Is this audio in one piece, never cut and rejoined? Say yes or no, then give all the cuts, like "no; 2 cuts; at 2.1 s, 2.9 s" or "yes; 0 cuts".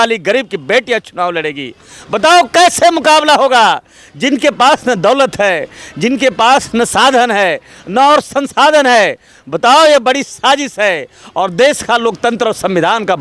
yes; 0 cuts